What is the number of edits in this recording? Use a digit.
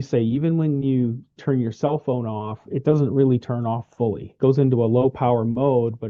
0